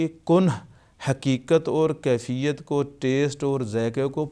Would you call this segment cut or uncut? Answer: uncut